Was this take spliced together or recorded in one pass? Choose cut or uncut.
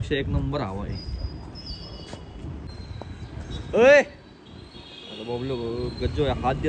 cut